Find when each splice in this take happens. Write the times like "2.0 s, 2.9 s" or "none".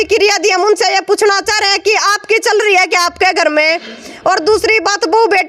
none